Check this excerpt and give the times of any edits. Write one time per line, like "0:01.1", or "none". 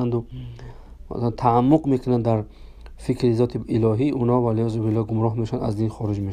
none

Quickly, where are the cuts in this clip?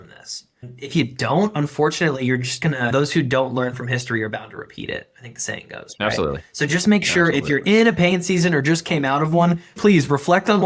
0:09.8

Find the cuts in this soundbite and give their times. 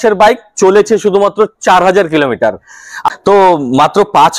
0:03.0

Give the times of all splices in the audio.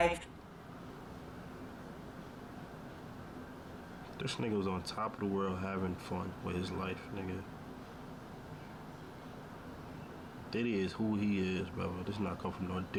none

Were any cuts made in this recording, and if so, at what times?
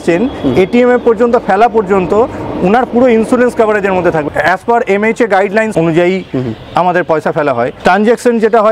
0:04.2
0:05.7
0:07.7

